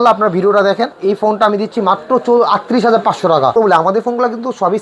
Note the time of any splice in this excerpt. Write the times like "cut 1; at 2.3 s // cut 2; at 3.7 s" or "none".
cut 1; at 1.0 s // cut 2; at 3.6 s